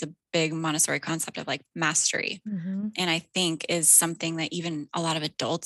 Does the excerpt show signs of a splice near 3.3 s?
no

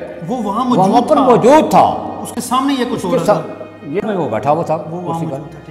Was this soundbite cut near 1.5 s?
no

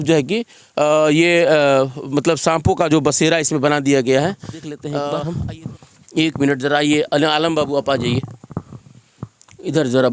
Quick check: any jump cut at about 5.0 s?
yes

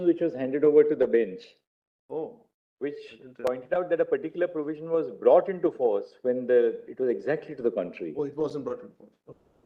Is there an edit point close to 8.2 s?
no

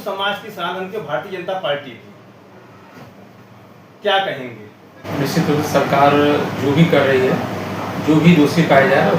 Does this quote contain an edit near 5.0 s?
yes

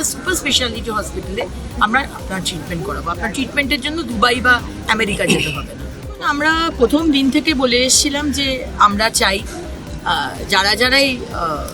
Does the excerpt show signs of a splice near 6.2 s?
yes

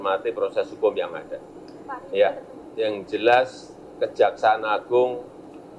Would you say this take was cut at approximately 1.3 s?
no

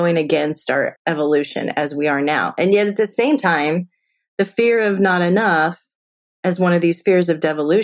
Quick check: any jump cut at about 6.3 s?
no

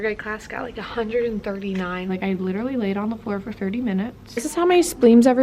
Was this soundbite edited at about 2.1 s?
yes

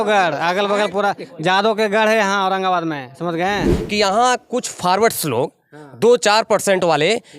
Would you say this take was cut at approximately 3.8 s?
yes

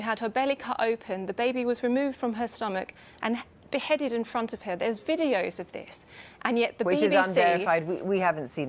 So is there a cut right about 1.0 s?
no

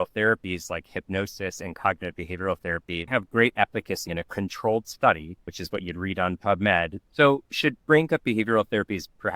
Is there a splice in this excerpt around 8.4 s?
no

